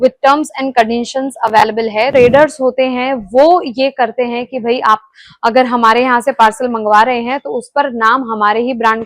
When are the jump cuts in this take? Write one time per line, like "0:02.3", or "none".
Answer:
0:02.1

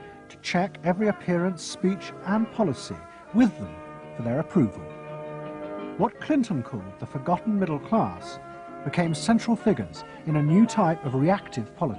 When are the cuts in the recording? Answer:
0:03.2

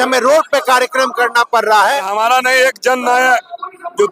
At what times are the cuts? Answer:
0:02.1

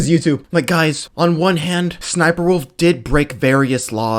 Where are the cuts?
0:01.0
0:02.0

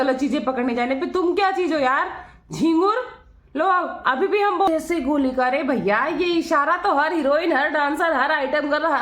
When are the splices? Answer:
0:04.7

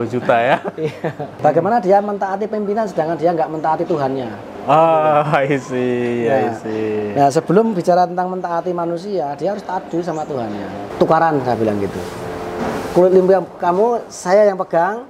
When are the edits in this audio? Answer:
0:01.3
0:10.9

